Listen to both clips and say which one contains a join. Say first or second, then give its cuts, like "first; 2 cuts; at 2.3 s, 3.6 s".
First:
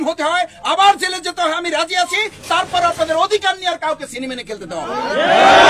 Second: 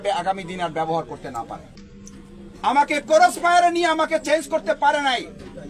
second; 1 cut; at 1.7 s